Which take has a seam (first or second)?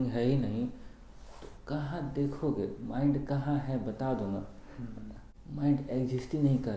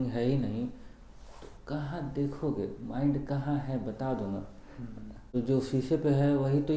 second